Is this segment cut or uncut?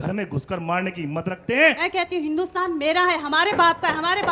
cut